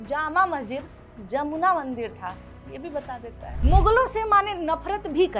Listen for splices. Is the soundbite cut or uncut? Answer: cut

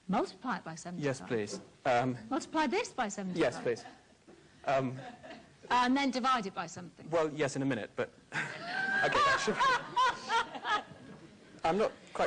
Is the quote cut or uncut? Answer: cut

